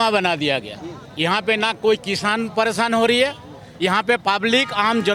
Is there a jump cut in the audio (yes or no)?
no